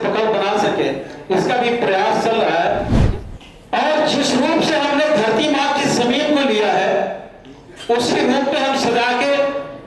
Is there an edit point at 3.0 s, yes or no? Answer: yes